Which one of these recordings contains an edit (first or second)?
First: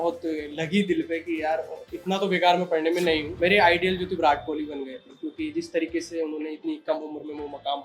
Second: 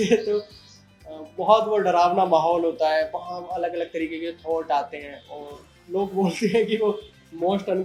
first